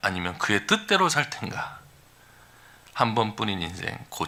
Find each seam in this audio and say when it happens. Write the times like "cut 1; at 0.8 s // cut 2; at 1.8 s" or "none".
none